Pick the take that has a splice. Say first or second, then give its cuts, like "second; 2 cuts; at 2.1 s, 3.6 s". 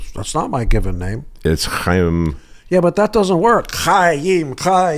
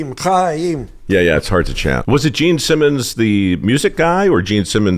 second; 1 cut; at 2.0 s